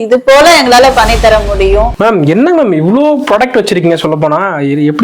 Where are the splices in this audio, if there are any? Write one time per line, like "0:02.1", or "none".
0:01.9